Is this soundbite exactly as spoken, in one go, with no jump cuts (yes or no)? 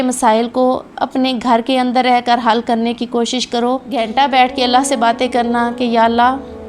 no